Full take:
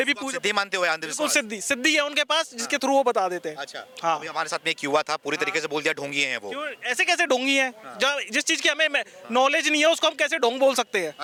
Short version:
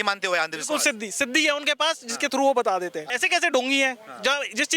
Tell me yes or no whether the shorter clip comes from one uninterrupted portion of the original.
no